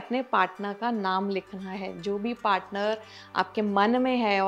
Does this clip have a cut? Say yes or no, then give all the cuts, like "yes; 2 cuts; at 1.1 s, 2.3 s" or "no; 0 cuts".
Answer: no; 0 cuts